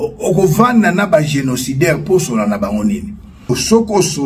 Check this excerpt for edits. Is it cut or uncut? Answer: uncut